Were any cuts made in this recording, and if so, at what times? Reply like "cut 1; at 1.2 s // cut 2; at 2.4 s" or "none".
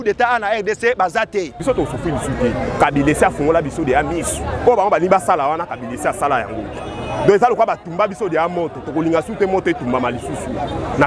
cut 1; at 1.5 s